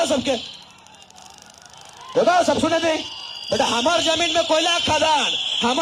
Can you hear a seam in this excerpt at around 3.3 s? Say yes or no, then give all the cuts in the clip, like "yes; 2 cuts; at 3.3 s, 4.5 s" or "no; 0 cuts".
no; 0 cuts